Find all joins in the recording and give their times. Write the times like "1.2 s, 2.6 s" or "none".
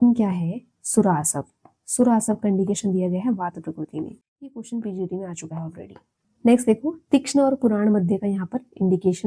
6.2 s

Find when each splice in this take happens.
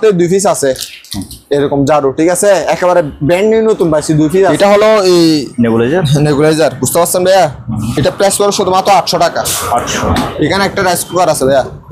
4.5 s

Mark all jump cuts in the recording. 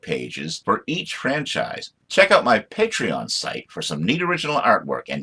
1.9 s

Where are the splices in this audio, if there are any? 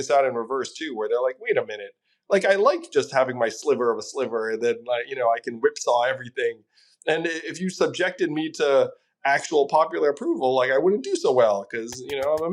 none

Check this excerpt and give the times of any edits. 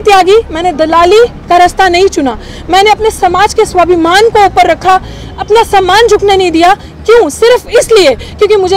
none

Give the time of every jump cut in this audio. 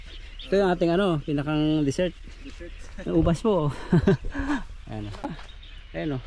5.2 s

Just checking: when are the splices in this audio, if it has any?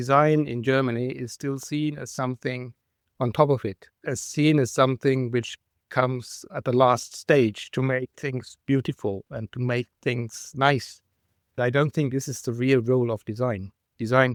none

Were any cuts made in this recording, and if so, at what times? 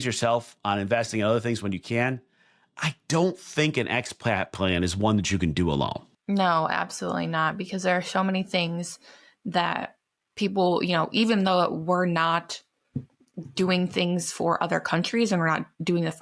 6.1 s

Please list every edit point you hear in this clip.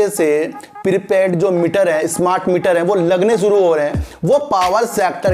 none

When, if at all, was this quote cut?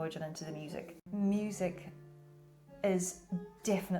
1.0 s

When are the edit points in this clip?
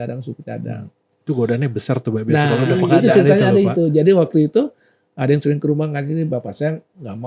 none

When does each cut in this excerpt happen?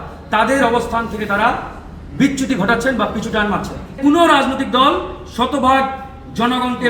4.0 s

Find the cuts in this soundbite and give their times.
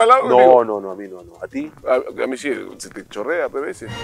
1.8 s

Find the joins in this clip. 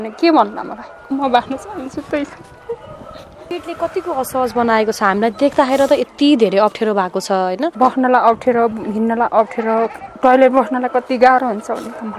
1.1 s, 3.5 s, 7.7 s, 10.0 s

